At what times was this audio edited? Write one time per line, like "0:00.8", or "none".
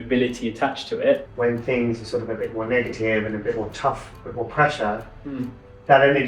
0:01.3